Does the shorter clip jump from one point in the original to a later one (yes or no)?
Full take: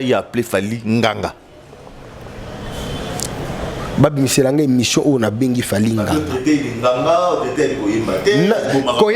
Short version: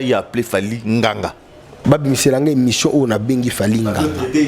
yes